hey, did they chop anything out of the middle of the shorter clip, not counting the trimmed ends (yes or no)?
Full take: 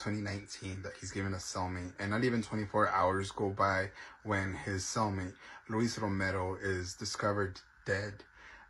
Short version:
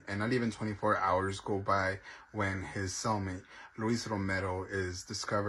no